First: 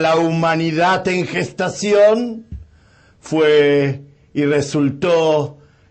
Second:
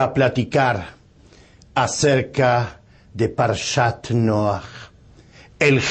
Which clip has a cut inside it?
first; 1 cut; at 4.5 s

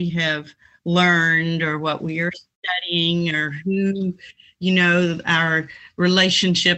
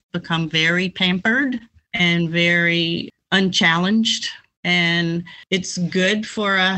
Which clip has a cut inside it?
second; 4 cuts; at 1.8 s, 3.1 s, 4.5 s, 5.3 s

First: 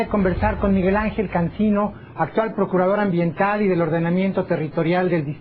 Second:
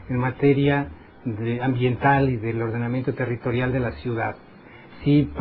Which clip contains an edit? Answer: first; 1 cut; at 1.6 s

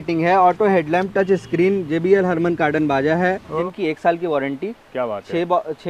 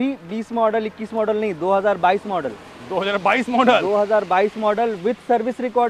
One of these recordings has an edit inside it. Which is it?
first; 1 cut; at 3.6 s

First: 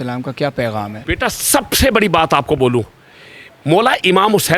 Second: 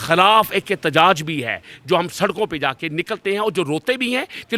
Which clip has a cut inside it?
first; 1 cut; at 1.0 s

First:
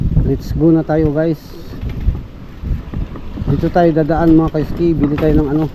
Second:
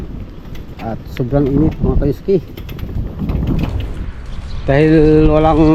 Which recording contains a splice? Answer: second; 1 cut; at 3.9 s

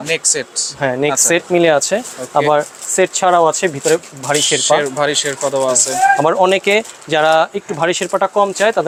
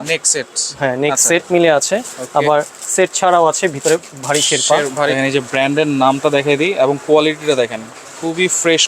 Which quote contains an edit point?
second; 1 cut; at 5.1 s

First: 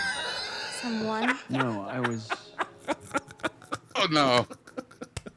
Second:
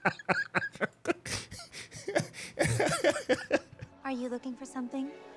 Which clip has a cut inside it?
second; 1 cut; at 3.9 s

